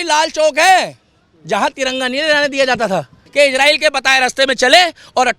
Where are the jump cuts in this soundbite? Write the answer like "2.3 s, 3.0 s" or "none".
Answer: 3.2 s

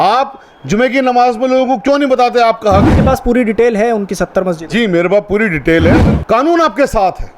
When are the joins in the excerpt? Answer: 3.0 s, 6.0 s

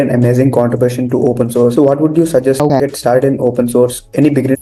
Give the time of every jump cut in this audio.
none

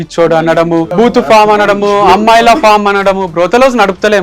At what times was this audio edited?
0.9 s

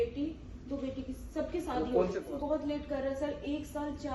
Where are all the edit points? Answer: 2.2 s

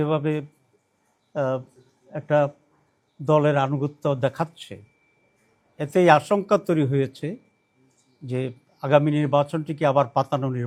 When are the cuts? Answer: none

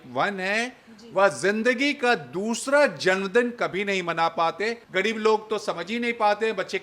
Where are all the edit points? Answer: 4.8 s

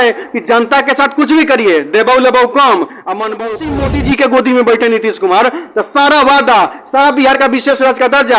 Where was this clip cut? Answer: 3.5 s

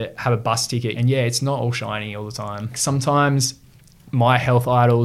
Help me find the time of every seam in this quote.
0.9 s, 2.8 s

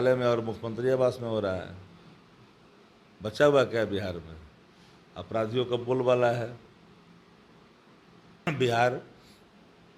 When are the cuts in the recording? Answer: 8.5 s

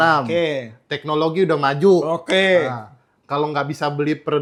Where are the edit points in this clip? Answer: none

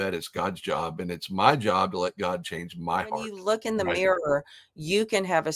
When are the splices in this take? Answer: 3.3 s

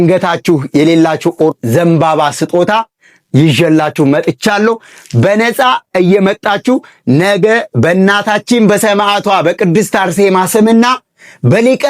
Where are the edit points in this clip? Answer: 1.5 s

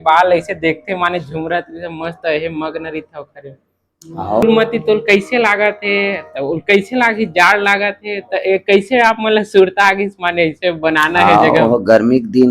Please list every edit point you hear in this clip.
4.4 s

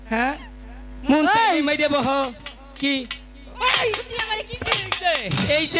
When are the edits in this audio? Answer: none

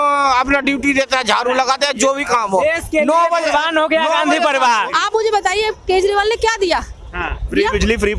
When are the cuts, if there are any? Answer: 4.9 s

